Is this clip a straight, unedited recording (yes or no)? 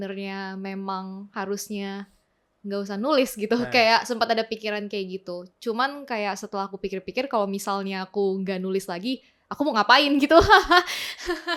yes